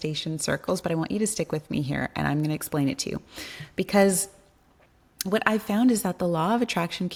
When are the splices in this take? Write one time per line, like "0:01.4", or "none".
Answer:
none